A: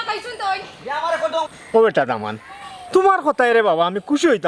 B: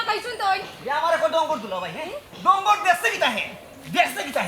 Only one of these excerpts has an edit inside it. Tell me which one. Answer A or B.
A